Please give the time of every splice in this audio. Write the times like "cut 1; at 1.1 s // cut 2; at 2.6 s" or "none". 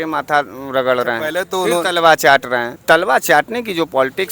cut 1; at 2.8 s